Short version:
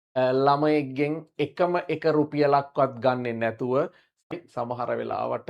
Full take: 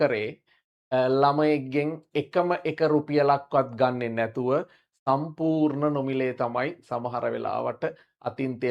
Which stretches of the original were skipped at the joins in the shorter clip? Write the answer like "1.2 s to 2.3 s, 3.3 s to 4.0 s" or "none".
5.0 s to 6.6 s